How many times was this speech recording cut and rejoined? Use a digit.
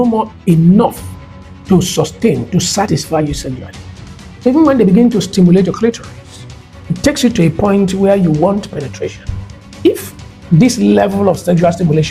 1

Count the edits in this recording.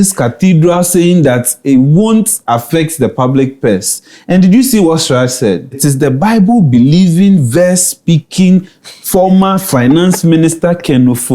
1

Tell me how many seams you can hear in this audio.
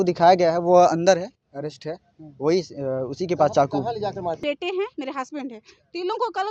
1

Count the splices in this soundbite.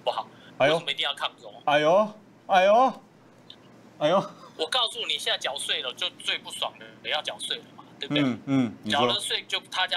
0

